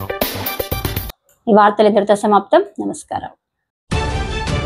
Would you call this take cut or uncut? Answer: uncut